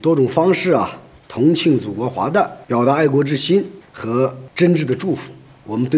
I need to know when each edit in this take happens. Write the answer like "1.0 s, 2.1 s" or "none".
2.6 s